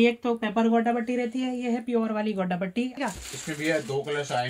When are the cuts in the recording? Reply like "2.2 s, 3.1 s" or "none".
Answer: 3.0 s